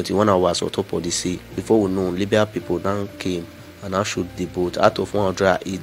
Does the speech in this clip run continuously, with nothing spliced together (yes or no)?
no